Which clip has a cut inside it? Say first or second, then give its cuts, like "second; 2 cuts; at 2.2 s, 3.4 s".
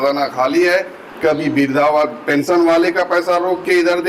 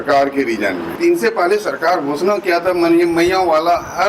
second; 1 cut; at 0.9 s